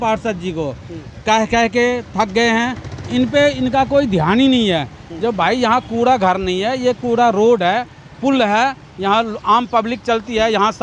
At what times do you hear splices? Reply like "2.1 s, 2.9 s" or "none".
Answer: none